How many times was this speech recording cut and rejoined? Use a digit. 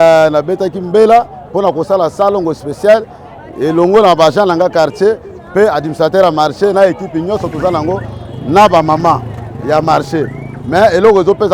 0